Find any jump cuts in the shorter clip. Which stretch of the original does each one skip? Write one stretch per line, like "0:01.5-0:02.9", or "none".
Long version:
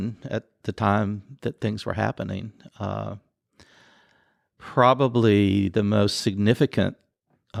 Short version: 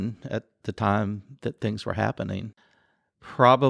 0:02.6-0:04.0